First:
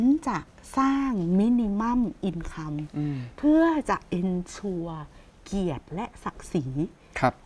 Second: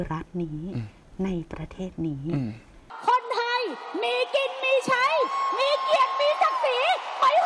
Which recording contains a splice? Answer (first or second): second